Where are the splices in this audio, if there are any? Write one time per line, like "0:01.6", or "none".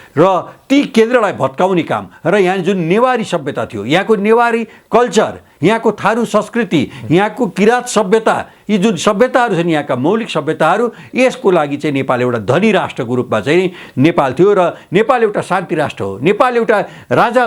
none